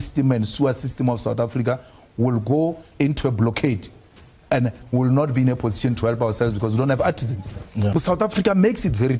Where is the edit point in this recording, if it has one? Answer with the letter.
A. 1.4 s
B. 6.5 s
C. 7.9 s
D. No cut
C